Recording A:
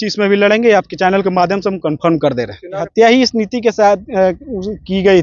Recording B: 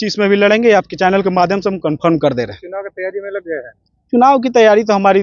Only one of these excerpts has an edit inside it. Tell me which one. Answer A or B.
A